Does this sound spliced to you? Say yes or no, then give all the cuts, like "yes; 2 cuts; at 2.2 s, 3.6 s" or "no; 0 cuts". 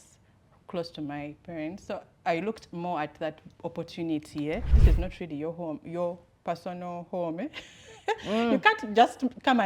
yes; 1 cut; at 4.7 s